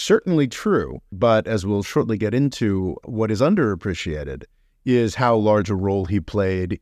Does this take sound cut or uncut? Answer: cut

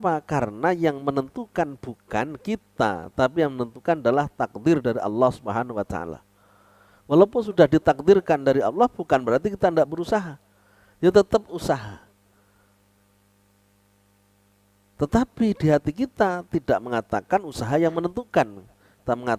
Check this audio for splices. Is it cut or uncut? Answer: uncut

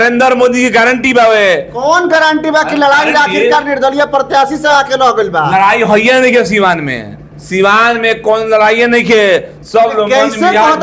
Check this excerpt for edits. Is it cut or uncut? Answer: uncut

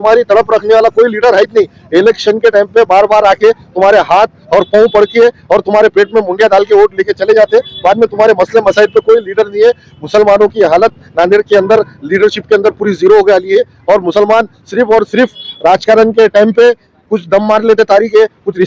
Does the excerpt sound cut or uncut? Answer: uncut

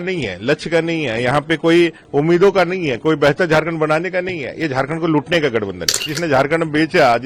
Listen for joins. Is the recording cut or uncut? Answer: cut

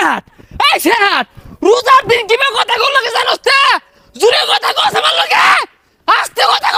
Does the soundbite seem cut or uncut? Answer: uncut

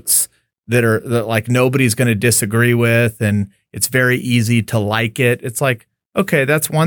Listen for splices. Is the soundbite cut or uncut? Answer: uncut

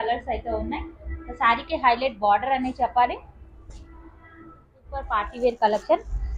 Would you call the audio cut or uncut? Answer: cut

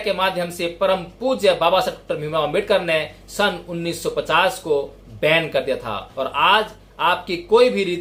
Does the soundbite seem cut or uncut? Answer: uncut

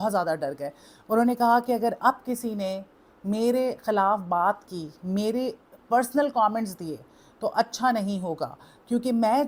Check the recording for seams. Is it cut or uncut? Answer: uncut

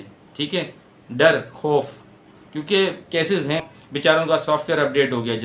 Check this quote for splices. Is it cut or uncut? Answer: cut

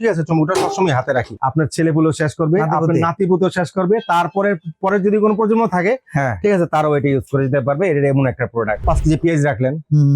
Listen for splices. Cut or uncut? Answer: cut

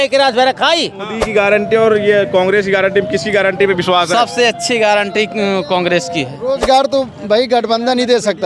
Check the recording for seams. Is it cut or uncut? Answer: cut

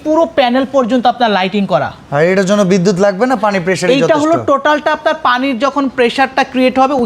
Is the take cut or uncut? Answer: uncut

